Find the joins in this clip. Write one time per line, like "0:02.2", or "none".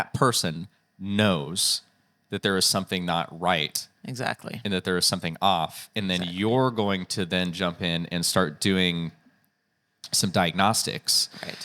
none